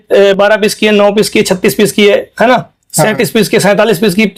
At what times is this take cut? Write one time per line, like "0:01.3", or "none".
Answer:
none